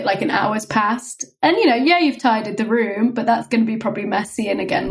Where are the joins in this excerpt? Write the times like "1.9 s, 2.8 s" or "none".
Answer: none